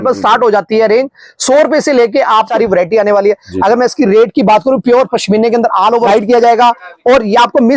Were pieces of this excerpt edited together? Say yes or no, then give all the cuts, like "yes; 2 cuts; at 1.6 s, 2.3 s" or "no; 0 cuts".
yes; 2 cuts; at 2.5 s, 6.1 s